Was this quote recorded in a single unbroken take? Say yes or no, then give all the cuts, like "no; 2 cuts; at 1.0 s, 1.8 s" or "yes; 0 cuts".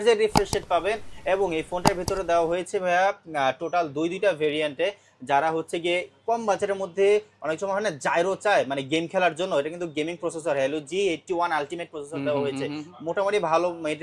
yes; 0 cuts